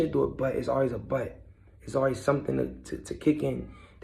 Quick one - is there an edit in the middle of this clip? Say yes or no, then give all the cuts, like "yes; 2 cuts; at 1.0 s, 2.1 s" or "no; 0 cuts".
no; 0 cuts